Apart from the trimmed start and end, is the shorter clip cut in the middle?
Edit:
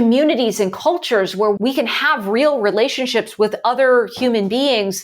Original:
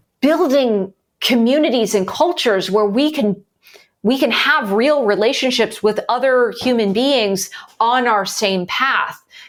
yes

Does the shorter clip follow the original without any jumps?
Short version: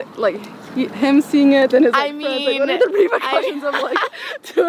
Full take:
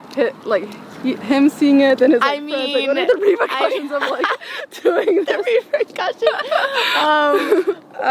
yes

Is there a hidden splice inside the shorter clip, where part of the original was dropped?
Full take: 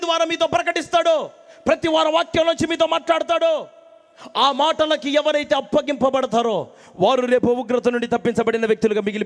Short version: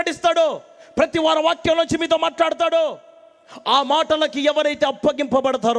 no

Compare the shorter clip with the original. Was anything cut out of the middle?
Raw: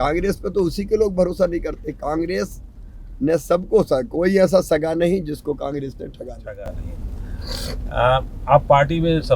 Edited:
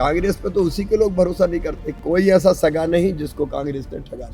yes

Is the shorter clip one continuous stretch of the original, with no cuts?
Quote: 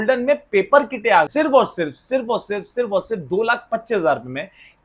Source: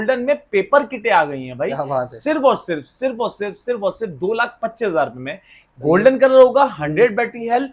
no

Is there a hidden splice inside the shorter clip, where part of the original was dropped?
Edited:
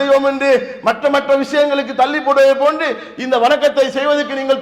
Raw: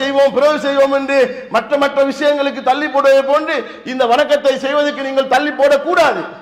no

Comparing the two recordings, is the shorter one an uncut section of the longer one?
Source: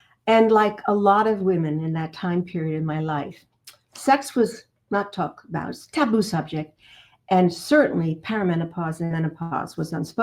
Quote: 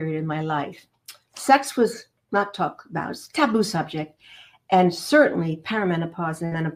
yes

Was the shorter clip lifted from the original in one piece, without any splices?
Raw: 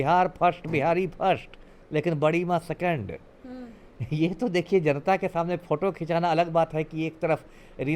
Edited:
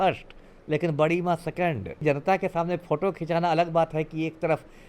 no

